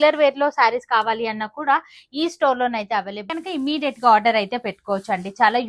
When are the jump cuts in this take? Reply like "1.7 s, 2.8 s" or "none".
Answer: 3.3 s